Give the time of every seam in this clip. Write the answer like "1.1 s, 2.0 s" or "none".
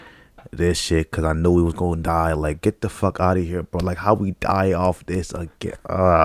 none